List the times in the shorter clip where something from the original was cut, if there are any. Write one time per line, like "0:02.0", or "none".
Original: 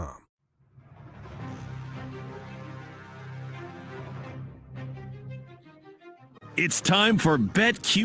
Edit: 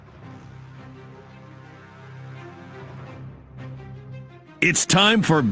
0:04.6